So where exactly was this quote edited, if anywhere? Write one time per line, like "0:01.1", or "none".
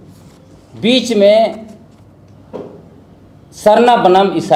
none